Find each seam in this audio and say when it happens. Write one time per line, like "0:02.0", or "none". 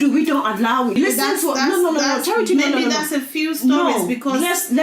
0:01.0